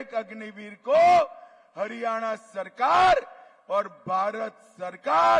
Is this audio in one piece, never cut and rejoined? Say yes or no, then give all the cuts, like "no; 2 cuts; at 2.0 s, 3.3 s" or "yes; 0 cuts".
yes; 0 cuts